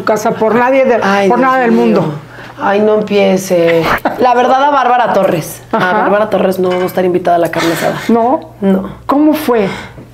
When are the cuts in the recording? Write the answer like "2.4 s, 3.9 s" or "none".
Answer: 3.9 s